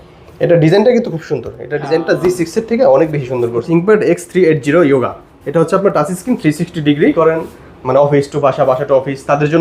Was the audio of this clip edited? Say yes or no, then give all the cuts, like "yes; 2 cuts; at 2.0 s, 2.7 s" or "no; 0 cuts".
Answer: yes; 2 cuts; at 3.6 s, 7.1 s